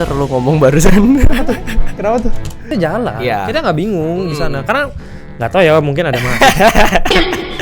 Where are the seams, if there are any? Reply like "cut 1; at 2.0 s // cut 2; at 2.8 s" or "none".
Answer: cut 1; at 2.6 s